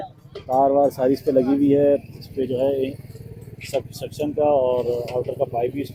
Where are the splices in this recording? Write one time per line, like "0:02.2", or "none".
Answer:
none